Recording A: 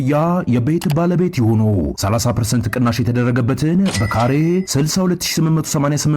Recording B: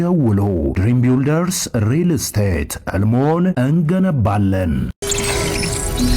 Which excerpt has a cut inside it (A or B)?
B